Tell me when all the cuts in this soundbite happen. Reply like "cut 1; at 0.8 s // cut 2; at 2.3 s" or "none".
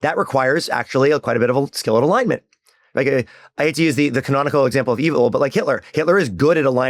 none